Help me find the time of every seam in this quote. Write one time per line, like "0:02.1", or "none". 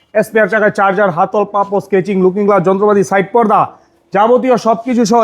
none